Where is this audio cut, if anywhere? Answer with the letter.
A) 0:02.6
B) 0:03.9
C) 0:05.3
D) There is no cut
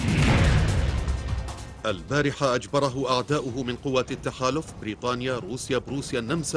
B